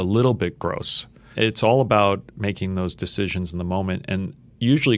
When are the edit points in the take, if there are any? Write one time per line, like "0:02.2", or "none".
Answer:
0:01.3